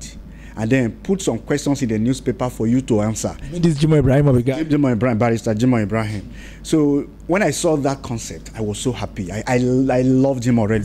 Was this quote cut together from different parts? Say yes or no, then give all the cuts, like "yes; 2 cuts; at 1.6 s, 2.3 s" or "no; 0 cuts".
no; 0 cuts